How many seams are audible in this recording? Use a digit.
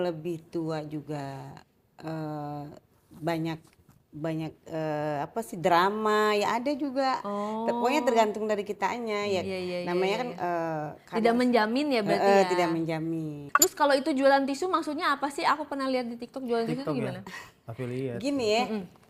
1